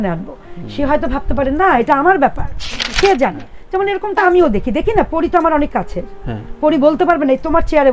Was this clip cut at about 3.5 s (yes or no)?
yes